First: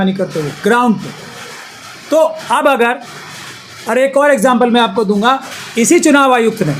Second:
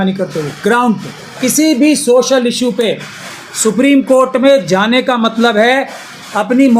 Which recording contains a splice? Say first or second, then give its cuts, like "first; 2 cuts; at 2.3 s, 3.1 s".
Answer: second; 1 cut; at 1.3 s